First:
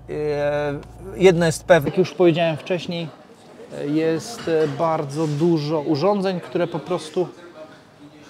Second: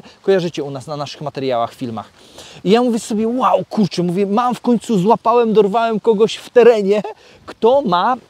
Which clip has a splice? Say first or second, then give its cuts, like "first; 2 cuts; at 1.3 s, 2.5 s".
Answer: first; 1 cut; at 1.9 s